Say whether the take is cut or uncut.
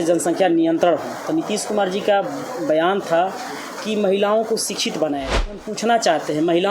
cut